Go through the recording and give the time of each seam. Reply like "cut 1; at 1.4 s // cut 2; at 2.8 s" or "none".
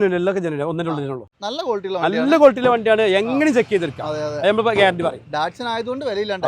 cut 1; at 1.3 s